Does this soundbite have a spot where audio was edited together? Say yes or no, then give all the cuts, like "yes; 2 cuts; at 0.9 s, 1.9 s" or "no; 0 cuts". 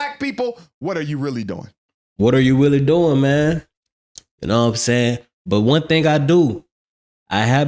no; 0 cuts